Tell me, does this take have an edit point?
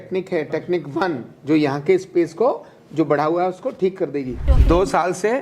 yes; 1 cut; at 4.4 s

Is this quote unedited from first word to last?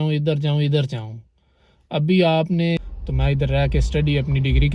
no; 1 cut; at 2.8 s

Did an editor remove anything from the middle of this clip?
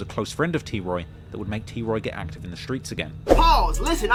no; 0 cuts

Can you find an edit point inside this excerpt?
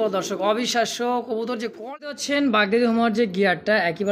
yes; 1 cut; at 2.1 s

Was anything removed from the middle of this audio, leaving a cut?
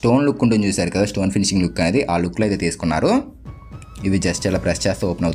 no; 0 cuts

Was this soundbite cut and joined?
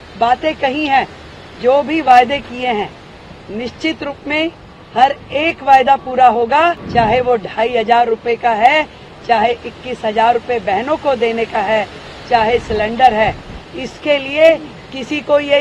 yes; 1 cut; at 6.8 s

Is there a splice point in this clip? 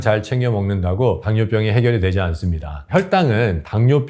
no; 0 cuts

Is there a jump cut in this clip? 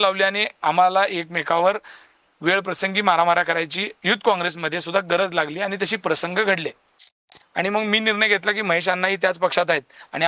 yes; 1 cut; at 7.4 s

